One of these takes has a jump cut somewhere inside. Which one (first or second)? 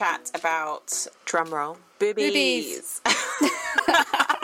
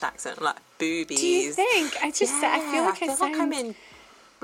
first